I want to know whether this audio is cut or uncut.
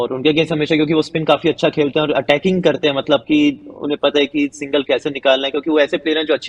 uncut